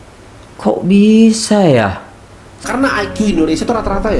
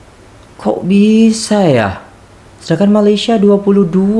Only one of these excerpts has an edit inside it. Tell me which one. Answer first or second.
first